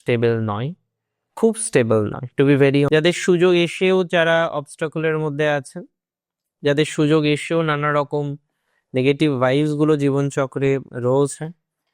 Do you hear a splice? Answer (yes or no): yes